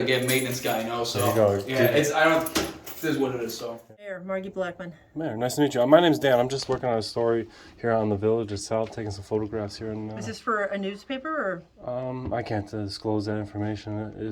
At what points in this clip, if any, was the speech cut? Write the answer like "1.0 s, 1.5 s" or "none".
3.9 s